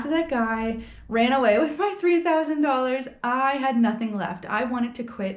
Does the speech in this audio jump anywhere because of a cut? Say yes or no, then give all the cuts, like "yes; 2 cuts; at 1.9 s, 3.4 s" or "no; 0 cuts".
no; 0 cuts